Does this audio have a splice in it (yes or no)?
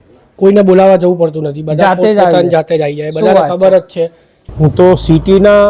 yes